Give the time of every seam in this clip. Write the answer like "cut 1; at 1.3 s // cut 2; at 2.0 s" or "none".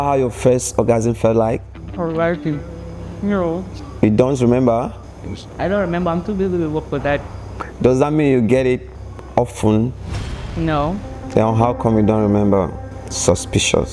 none